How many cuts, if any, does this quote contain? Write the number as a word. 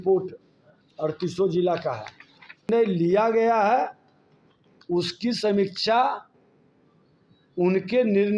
one